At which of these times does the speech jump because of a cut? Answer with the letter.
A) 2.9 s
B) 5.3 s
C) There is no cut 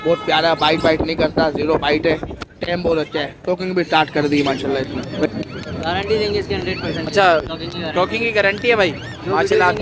B